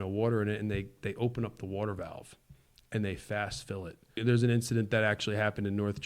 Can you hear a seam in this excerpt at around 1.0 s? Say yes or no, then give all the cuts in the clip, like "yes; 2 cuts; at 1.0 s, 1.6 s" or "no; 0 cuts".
no; 1 cut; at 4.2 s